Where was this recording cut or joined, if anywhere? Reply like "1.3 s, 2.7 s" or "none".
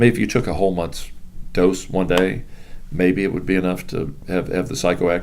4.2 s